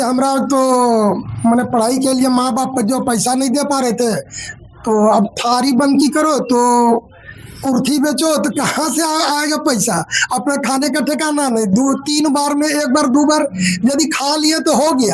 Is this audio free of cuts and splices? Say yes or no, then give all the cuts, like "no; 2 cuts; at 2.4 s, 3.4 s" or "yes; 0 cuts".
yes; 0 cuts